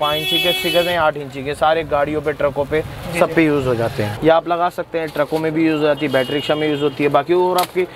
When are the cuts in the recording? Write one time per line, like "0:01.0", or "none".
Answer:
0:04.1